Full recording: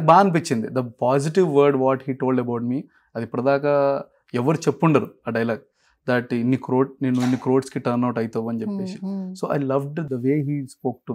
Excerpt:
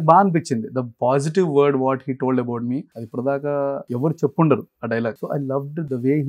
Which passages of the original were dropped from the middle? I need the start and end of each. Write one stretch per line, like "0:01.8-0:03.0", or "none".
0:03.0-0:03.2
0:04.1-0:04.3
0:05.7-0:09.4